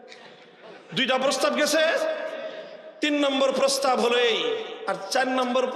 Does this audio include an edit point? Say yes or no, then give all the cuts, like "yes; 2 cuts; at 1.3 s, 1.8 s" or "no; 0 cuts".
yes; 1 cut; at 4.7 s